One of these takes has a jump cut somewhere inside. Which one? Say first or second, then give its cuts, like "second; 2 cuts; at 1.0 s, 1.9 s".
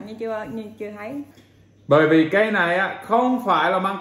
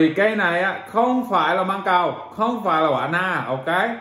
first; 1 cut; at 1.2 s